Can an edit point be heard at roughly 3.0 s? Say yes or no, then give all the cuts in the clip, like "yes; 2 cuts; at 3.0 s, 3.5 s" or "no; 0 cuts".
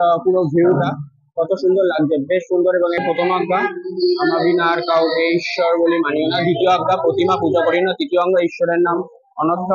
yes; 1 cut; at 3.0 s